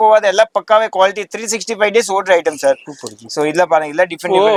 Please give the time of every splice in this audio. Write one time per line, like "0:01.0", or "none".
none